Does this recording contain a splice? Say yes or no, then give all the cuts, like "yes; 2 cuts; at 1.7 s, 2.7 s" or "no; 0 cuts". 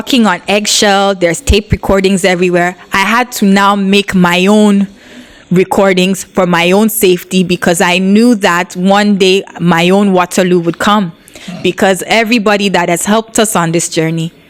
no; 0 cuts